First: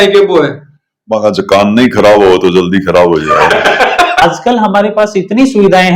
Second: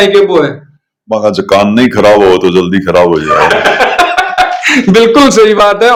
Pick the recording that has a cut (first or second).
first